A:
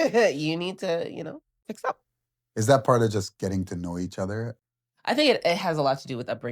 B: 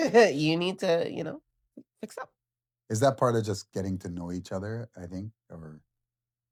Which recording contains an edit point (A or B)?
A